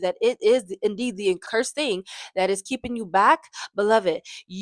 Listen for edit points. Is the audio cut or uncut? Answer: cut